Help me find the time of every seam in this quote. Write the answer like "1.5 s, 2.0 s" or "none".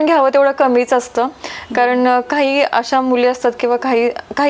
none